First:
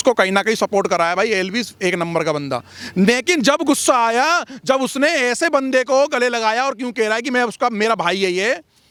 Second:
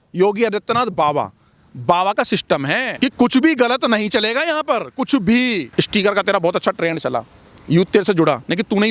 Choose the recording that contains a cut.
second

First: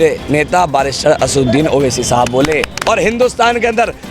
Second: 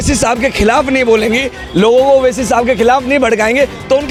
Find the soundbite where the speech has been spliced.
first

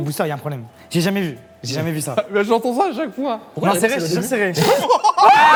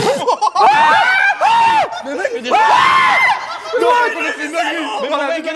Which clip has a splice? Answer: second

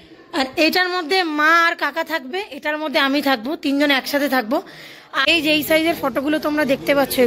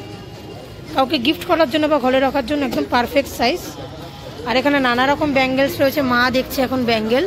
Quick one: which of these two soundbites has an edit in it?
first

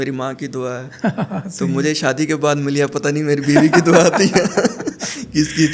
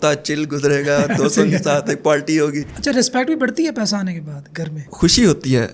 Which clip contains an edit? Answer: second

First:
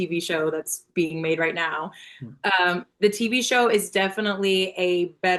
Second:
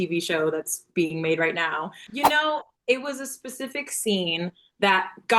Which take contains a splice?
second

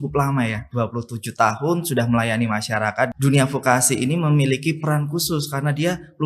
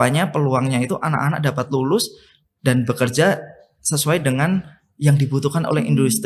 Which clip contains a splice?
first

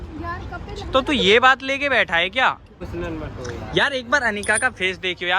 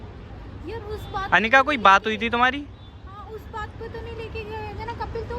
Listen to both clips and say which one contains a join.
first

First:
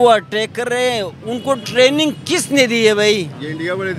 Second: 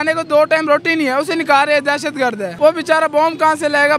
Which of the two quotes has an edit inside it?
second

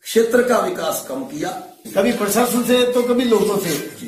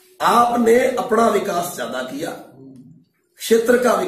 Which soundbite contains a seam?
first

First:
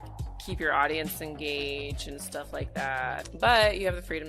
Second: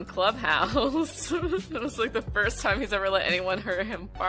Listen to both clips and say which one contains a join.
first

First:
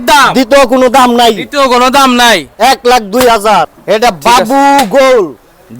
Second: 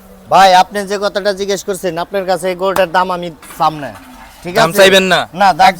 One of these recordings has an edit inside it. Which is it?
first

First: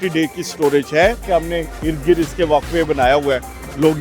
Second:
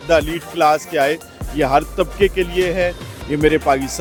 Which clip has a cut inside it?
first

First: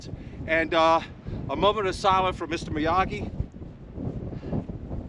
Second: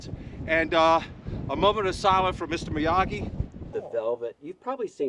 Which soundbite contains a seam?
second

